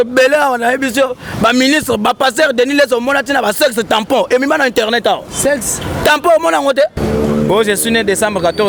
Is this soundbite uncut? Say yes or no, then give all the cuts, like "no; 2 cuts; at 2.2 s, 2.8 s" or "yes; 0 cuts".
no; 1 cut; at 7.0 s